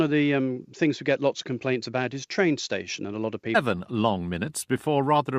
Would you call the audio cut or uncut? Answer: uncut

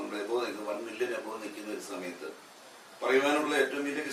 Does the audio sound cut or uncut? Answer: uncut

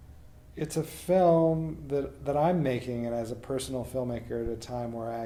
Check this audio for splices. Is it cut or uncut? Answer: uncut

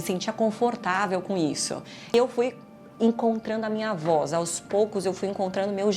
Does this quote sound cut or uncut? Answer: cut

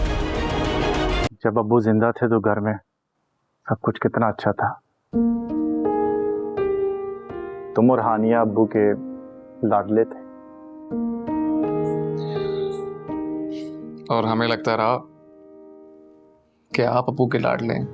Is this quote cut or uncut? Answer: cut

